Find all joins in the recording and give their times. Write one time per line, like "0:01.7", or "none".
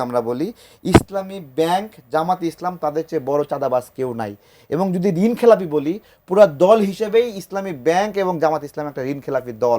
none